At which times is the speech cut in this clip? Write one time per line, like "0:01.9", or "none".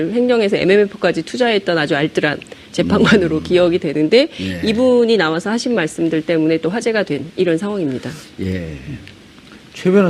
0:03.5